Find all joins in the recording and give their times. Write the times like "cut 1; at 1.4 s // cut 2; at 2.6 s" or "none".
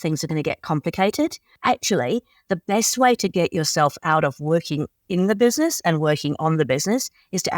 cut 1; at 1.5 s

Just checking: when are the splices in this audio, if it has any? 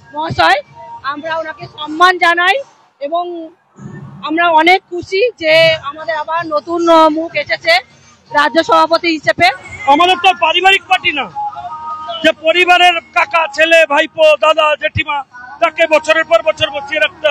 cut 1; at 9.7 s

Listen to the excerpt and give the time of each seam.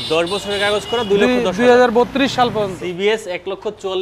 cut 1; at 2.8 s

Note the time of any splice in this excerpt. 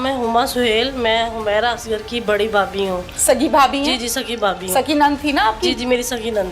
none

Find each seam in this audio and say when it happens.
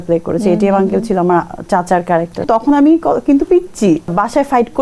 cut 1; at 2.5 s // cut 2; at 4.1 s

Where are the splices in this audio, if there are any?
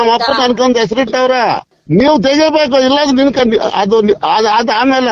cut 1; at 1.7 s

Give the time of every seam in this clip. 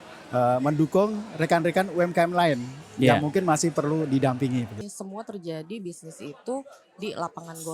cut 1; at 4.8 s

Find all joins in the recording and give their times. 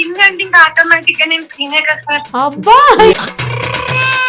cut 1; at 2.3 s // cut 2; at 3.1 s

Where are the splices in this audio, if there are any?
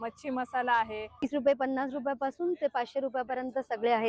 cut 1; at 1.3 s

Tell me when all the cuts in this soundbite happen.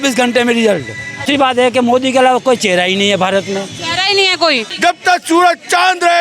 cut 1; at 1.3 s // cut 2; at 4.7 s

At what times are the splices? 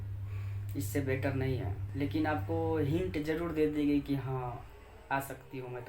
cut 1; at 1.8 s

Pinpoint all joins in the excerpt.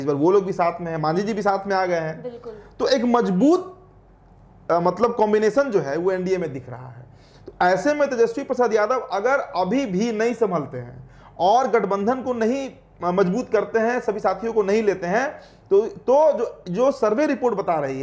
none

